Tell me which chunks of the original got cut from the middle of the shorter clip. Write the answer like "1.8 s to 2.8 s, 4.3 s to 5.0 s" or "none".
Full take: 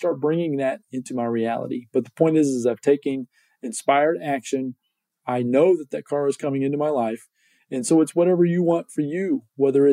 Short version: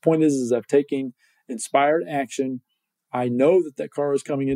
none